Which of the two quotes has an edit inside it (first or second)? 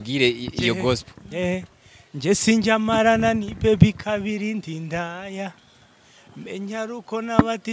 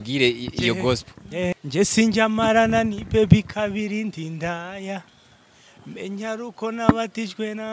second